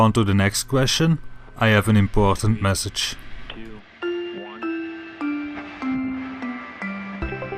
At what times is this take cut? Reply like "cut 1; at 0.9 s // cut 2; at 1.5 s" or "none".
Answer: cut 1; at 4.3 s